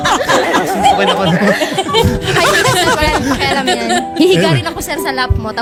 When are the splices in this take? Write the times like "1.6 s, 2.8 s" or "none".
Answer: none